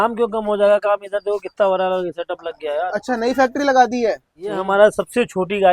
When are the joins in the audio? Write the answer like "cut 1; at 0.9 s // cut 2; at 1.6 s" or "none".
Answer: cut 1; at 4.6 s